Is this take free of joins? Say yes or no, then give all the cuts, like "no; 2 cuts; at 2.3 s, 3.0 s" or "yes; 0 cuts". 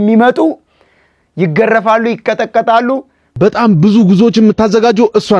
yes; 0 cuts